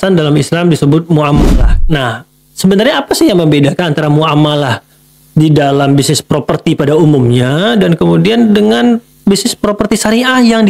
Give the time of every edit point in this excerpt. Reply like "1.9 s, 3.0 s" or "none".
1.5 s